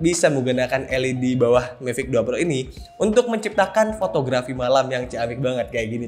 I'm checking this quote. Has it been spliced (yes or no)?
no